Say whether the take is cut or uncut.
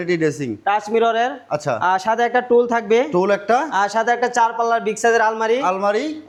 uncut